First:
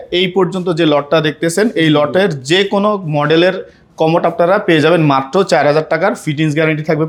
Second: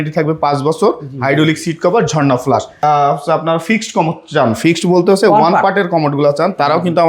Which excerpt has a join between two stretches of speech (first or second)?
second